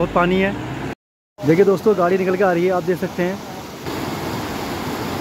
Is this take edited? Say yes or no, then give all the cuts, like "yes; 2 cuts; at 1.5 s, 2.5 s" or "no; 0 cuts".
yes; 2 cuts; at 1.0 s, 3.9 s